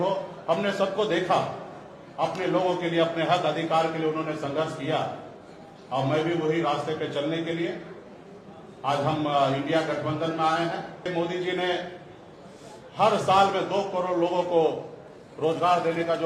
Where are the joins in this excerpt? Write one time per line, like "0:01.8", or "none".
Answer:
0:11.0